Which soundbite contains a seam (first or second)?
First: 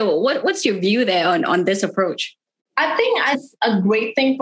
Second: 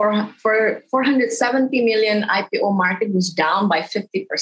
first